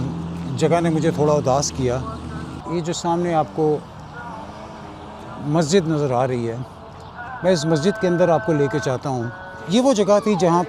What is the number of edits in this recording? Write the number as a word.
two